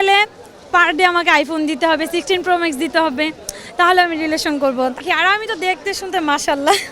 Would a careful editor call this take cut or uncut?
cut